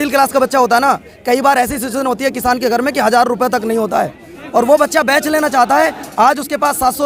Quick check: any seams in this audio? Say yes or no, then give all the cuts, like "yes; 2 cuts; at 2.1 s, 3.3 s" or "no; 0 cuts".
no; 0 cuts